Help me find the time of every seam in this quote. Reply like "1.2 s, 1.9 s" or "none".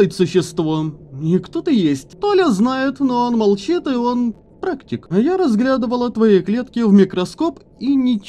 2.1 s, 5.0 s